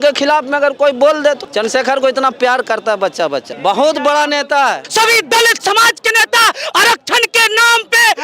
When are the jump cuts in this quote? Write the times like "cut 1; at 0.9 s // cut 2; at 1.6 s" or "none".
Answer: cut 1; at 1.5 s // cut 2; at 3.5 s // cut 3; at 4.8 s